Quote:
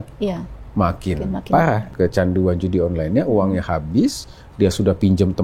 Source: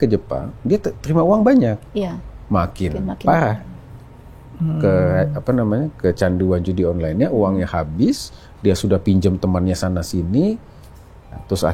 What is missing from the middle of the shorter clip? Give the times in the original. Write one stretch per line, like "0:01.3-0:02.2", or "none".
0:03.6-0:05.9